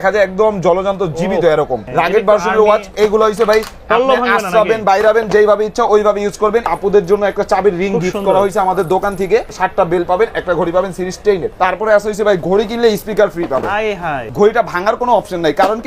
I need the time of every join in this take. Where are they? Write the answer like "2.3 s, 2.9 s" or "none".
1.8 s, 6.7 s, 9.5 s, 11.5 s, 14.2 s